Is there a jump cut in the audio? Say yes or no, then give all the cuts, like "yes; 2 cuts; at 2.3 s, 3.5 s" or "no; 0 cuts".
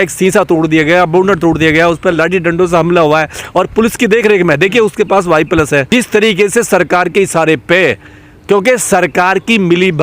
yes; 1 cut; at 5.9 s